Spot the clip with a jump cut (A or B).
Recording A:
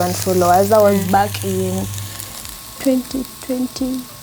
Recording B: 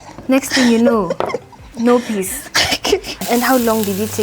B